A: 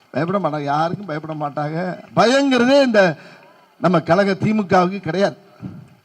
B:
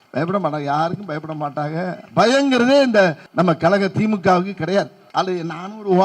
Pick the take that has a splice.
B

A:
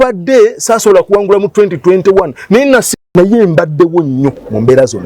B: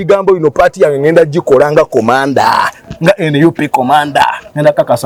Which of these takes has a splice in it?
A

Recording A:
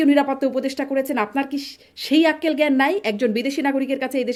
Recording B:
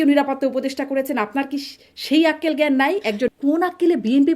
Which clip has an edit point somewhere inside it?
B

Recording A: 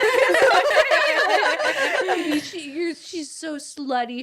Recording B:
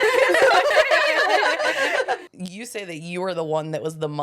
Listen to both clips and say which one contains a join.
B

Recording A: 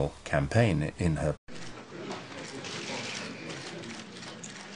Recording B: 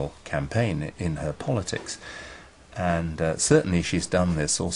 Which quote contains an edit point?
B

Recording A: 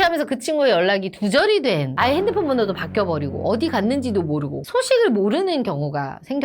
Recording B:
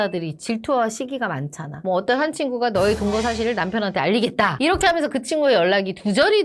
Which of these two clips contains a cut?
B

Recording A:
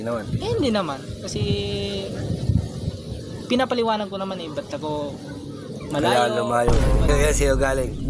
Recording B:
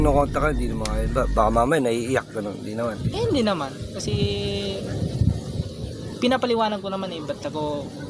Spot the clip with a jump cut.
A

